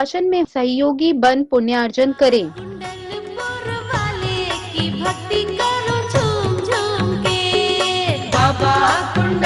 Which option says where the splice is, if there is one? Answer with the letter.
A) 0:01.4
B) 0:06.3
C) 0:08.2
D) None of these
C